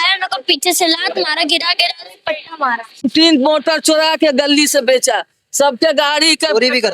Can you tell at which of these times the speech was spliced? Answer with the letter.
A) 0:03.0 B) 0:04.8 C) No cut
A